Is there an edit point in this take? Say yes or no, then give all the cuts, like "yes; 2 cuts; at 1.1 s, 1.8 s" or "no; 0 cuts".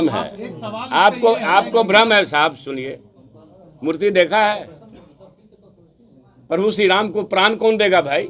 no; 0 cuts